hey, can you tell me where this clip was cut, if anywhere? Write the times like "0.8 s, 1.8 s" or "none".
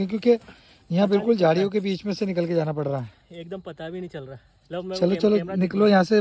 none

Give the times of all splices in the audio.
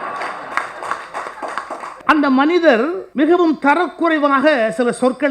2.0 s, 3.0 s

